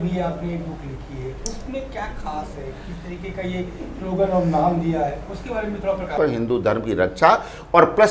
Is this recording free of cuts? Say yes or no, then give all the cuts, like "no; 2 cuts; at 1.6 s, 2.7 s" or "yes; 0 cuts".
no; 1 cut; at 6.1 s